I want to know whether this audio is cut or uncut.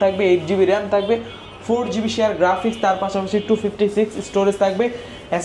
uncut